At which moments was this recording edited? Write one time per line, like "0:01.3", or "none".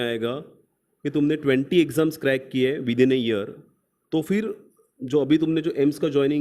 none